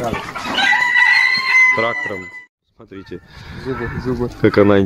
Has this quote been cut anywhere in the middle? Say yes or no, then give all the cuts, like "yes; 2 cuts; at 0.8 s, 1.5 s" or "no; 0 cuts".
yes; 1 cut; at 2.3 s